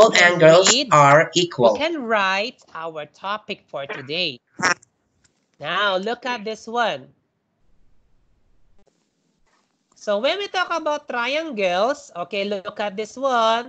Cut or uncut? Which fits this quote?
cut